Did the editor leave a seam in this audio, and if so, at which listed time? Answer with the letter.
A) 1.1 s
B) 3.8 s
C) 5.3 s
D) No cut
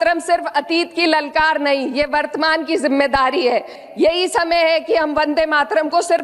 B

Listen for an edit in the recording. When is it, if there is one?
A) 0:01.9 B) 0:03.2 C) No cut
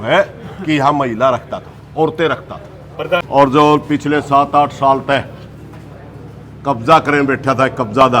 B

